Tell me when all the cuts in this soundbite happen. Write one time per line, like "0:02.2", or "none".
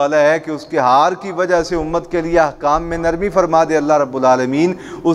none